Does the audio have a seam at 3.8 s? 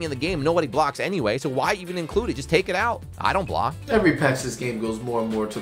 yes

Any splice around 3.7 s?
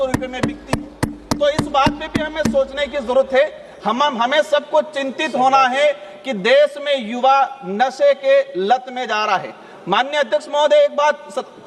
no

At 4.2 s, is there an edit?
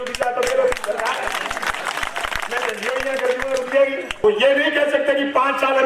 yes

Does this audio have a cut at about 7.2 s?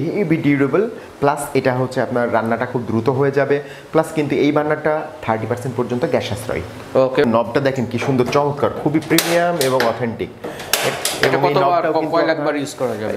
yes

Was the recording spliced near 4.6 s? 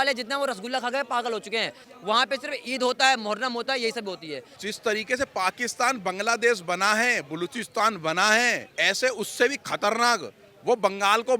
yes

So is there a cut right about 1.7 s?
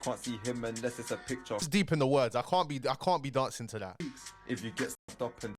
yes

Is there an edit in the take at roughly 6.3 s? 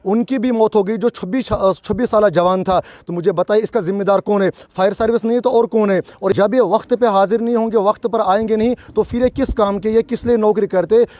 yes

